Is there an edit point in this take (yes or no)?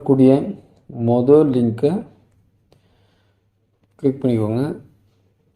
no